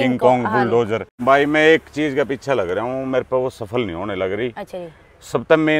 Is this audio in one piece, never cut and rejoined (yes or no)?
no